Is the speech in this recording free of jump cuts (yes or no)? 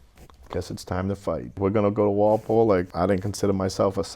no